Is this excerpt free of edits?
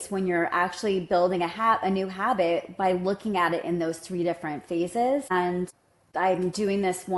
yes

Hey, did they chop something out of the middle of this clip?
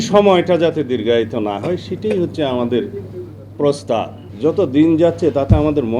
yes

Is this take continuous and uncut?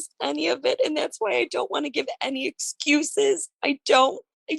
yes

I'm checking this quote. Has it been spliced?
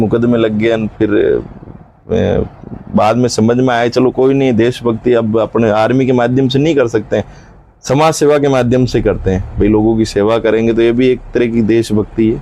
no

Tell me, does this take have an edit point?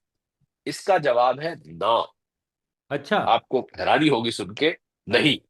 no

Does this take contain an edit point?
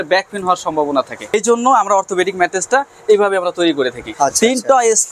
yes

